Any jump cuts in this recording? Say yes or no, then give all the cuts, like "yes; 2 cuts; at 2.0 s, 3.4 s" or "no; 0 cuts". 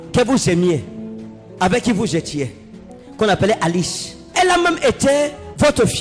yes; 1 cut; at 4.3 s